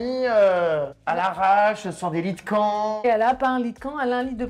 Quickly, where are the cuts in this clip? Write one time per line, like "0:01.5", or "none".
0:01.0
0:03.0